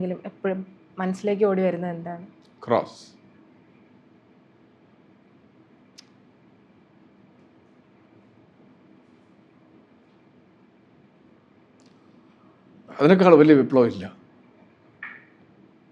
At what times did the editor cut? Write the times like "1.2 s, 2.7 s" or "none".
none